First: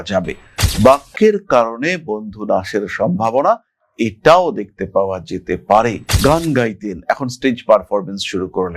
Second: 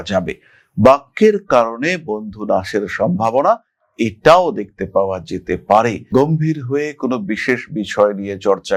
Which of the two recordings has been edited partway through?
first; 1 cut; at 6.0 s

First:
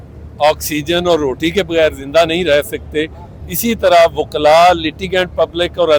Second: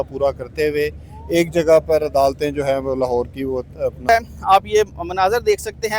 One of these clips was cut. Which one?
second; 1 cut; at 4.1 s

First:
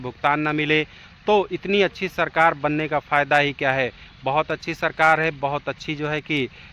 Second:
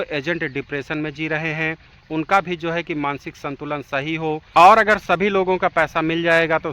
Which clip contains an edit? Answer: second; 1 cut; at 4.4 s

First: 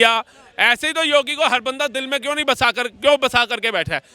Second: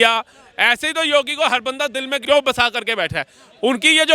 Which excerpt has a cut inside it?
second; 1 cut; at 2.2 s

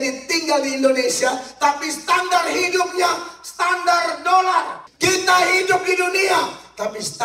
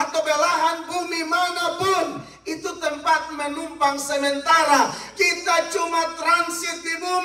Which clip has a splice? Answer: first; 1 cut; at 4.8 s

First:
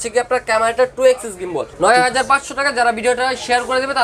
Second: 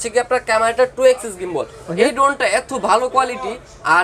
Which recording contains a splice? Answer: first; 1 cut; at 1.7 s

